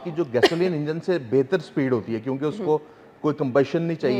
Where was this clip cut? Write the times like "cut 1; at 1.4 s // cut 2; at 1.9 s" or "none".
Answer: none

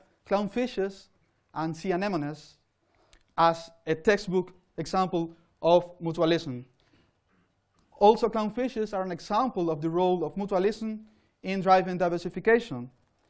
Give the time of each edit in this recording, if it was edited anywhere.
cut 1; at 5.9 s

